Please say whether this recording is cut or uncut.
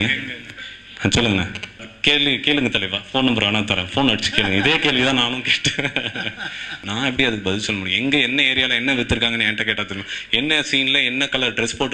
cut